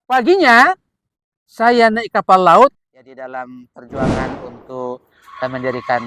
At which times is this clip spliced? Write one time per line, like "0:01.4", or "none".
0:02.8